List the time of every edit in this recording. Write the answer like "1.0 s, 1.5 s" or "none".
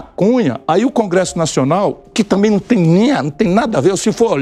none